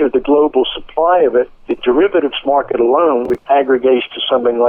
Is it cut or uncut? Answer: cut